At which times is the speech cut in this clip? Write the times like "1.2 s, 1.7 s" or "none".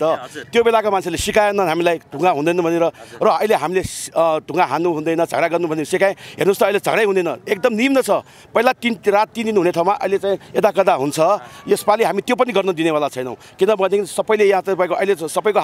none